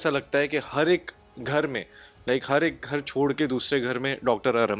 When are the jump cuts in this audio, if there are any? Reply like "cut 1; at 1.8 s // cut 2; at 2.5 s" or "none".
none